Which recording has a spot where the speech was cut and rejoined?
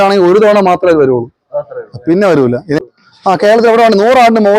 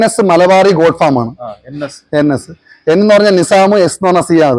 first; 1 cut; at 2.8 s

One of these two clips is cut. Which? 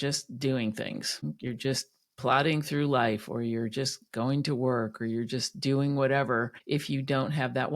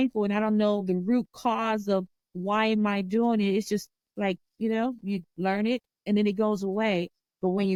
first; 2 cuts; at 1.2 s, 6.6 s

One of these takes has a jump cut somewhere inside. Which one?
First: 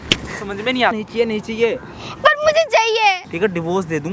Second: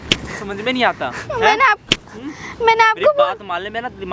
first; 2 cuts; at 1.0 s, 3.3 s

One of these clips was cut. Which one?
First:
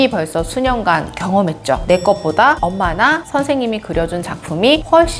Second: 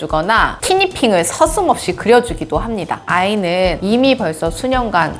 second; 1 cut; at 3.0 s

